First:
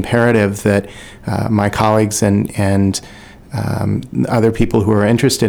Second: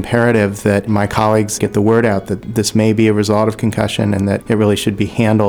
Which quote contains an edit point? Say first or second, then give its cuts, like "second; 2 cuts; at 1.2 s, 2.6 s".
second; 2 cuts; at 1.5 s, 4.4 s